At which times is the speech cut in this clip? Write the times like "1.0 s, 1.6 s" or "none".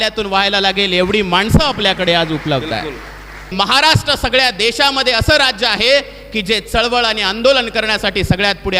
3.5 s